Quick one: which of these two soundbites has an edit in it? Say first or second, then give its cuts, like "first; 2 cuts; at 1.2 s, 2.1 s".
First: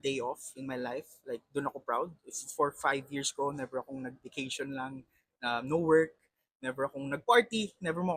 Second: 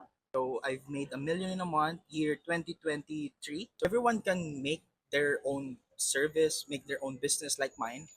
second; 1 cut; at 3.8 s